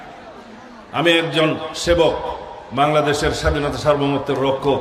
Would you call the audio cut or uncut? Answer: uncut